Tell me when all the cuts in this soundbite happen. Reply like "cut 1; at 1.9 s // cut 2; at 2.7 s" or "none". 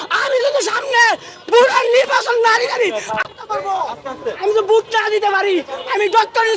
cut 1; at 3.5 s